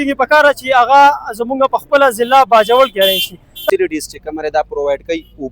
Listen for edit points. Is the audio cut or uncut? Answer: cut